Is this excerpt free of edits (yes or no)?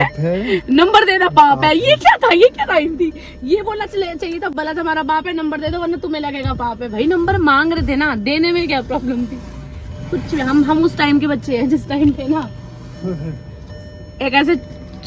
yes